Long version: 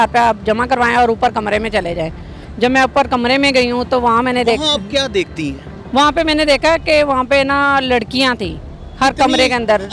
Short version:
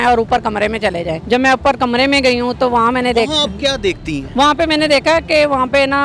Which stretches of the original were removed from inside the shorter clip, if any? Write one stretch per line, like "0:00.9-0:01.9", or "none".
0:02.1-0:02.5
0:05.5-0:05.7